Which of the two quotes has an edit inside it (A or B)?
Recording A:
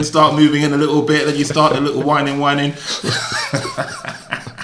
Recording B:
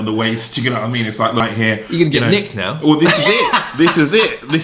B